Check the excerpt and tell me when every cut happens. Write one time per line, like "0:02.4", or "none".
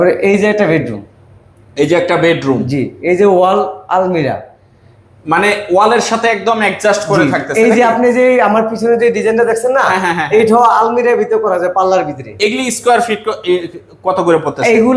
none

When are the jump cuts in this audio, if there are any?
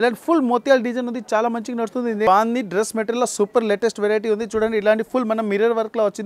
0:02.3

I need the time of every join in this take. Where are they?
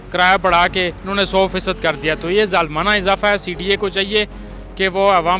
none

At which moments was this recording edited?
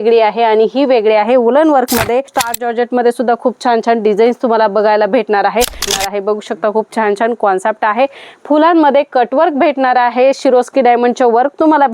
0:02.4
0:05.9

